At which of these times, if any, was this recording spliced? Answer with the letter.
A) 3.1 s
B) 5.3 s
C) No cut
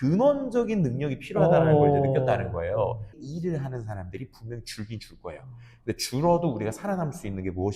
A